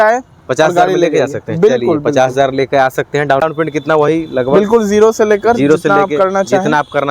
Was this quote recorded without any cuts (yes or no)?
no